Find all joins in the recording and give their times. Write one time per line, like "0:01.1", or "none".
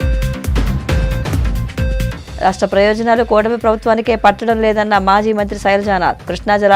0:01.4